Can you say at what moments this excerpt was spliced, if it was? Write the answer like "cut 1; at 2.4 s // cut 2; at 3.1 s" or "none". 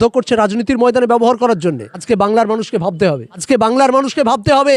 cut 1; at 1.9 s // cut 2; at 3.4 s